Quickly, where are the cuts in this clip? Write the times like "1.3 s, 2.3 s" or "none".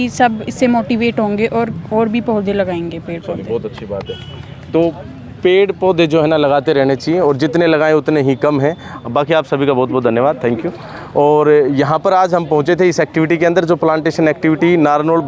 none

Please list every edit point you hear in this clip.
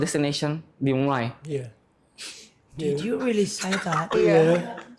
none

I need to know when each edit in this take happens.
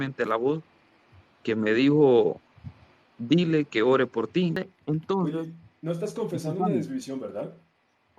4.6 s

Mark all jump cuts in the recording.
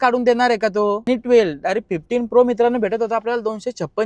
1.0 s

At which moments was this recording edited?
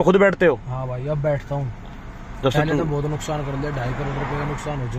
none

